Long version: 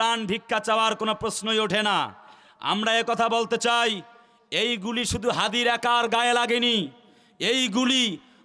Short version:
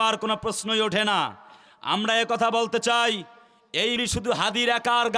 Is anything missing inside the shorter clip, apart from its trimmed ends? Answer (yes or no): yes